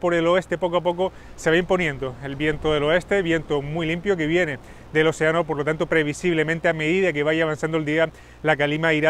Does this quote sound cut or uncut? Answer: cut